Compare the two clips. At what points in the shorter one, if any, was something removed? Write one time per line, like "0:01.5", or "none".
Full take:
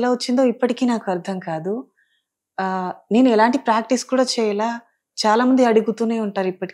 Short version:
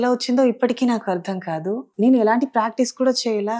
0:01.9

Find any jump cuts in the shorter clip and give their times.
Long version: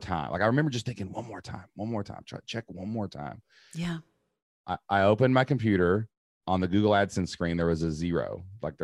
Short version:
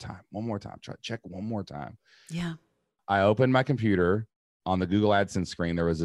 0:03.0

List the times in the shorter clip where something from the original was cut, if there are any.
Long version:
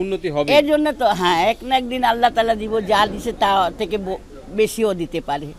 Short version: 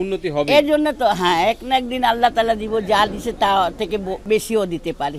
0:04.2

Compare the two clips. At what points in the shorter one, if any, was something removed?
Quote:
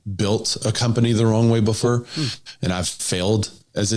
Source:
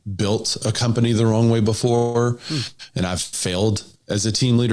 0:01.9

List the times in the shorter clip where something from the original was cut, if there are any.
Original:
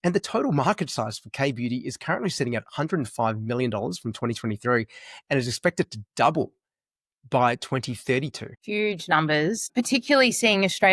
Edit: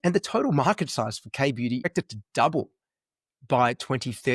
0:01.9

